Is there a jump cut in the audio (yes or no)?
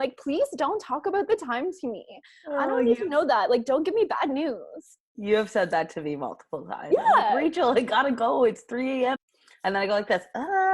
yes